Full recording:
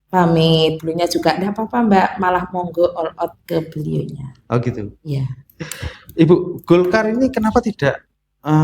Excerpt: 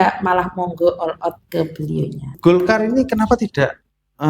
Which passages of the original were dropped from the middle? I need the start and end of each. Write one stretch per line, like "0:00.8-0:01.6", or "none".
0:04.3-0:06.6